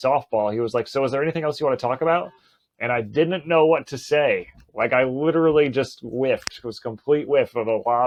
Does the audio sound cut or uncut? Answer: uncut